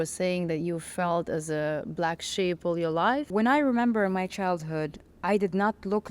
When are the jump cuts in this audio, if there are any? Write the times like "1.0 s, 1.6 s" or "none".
3.3 s

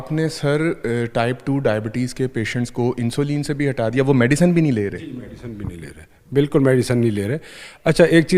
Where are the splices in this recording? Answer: none

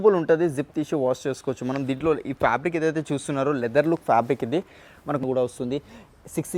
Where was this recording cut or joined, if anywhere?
5.2 s

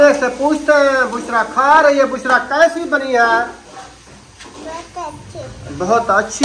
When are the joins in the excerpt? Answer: none

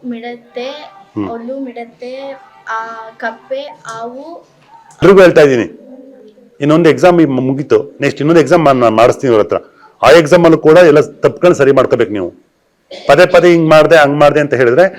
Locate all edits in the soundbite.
5.0 s

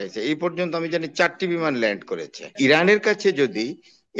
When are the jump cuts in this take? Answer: 2.5 s

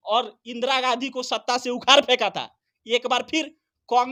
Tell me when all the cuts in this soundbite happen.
none

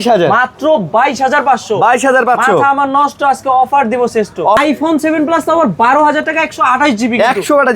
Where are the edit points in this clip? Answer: 4.6 s

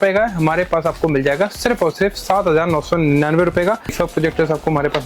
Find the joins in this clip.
3.9 s

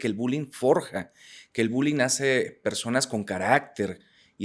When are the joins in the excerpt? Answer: none

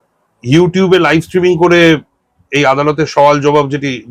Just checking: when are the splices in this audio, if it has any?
none

